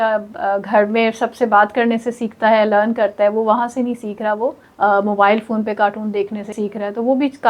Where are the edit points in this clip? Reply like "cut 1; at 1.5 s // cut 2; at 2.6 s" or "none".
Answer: cut 1; at 4.6 s // cut 2; at 6.5 s